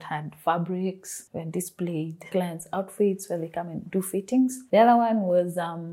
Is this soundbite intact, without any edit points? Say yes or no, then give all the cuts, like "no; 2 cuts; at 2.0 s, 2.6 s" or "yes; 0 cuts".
no; 1 cut; at 2.2 s